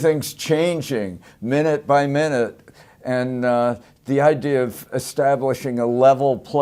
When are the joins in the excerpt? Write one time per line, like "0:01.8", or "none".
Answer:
0:02.1